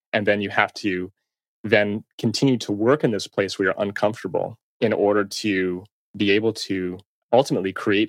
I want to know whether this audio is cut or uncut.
cut